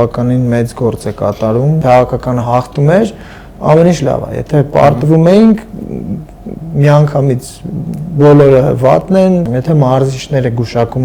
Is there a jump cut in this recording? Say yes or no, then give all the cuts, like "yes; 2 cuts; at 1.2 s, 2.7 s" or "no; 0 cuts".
yes; 2 cuts; at 1.8 s, 9.5 s